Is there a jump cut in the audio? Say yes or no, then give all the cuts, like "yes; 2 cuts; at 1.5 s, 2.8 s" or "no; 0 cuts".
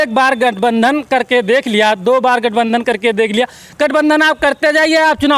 no; 0 cuts